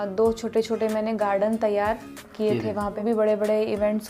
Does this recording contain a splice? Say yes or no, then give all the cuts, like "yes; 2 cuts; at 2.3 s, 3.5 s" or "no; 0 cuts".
yes; 1 cut; at 3.0 s